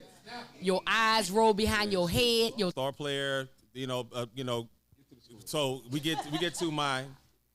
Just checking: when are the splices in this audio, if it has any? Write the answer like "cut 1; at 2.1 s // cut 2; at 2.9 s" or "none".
cut 1; at 2.7 s